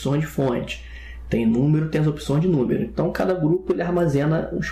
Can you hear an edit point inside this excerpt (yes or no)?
yes